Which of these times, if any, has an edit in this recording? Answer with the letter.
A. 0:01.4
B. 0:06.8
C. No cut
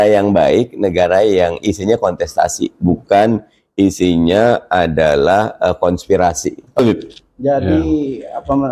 B